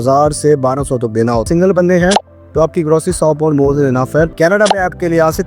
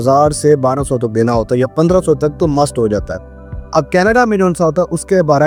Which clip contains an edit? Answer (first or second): first